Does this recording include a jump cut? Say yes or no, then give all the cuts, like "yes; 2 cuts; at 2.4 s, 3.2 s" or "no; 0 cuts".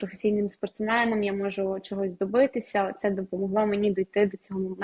no; 0 cuts